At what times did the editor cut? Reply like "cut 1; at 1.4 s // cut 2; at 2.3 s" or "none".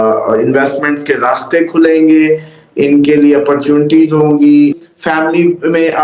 cut 1; at 4.9 s